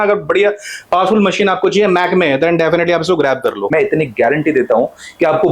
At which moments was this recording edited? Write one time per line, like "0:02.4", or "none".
0:03.7